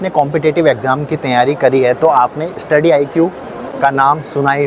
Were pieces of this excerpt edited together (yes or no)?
no